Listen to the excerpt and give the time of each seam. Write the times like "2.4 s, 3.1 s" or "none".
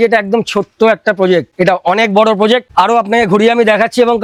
none